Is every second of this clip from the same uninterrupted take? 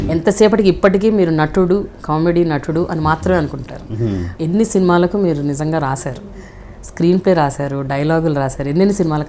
no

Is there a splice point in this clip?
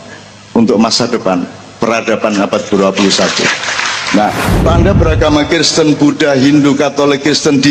yes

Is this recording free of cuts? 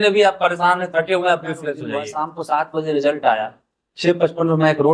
no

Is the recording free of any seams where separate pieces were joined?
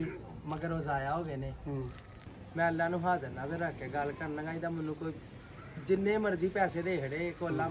no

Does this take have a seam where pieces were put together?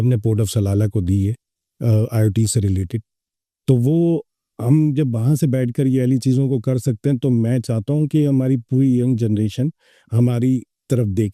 no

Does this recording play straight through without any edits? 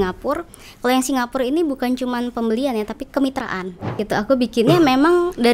no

